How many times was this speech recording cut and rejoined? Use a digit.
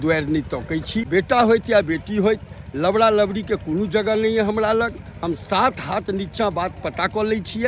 1